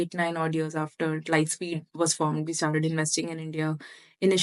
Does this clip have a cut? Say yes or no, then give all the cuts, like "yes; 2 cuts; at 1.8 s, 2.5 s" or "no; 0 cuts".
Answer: no; 0 cuts